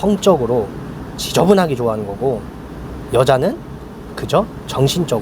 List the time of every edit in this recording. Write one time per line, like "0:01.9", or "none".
none